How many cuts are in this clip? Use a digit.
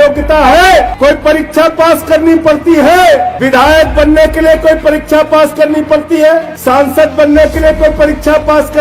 3